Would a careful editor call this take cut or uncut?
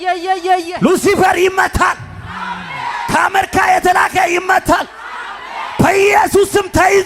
uncut